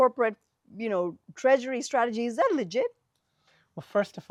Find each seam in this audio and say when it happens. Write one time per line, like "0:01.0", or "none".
none